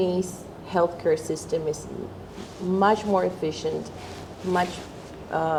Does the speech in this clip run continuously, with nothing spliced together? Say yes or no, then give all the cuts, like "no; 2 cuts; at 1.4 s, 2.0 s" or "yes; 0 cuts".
yes; 0 cuts